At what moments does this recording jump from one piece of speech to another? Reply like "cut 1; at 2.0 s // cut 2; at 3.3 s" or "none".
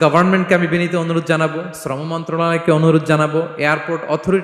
none